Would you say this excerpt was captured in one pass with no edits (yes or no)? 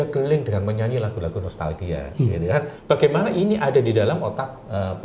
no